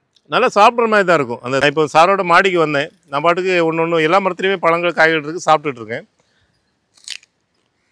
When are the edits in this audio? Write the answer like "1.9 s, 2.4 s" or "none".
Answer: 1.6 s